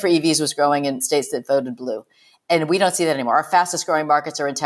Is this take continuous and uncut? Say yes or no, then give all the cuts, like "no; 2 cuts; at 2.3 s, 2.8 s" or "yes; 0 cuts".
no; 1 cut; at 1.0 s